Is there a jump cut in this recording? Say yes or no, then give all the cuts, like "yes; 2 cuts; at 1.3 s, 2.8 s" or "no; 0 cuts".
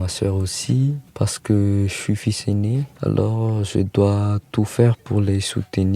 yes; 3 cuts; at 1.0 s, 2.9 s, 5.0 s